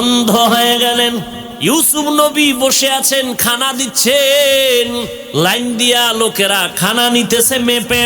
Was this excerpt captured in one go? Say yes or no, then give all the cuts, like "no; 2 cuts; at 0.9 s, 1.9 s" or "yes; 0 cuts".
no; 2 cuts; at 1.4 s, 5.2 s